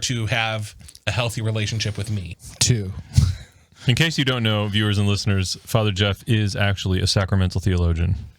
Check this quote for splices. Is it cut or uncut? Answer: cut